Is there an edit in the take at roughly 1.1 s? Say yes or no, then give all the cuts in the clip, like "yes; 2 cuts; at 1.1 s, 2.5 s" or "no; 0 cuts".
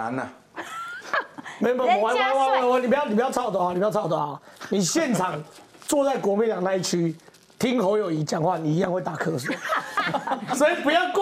no; 0 cuts